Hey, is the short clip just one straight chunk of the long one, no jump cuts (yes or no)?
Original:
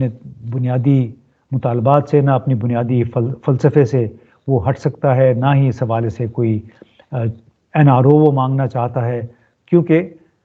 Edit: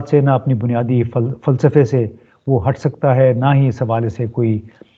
yes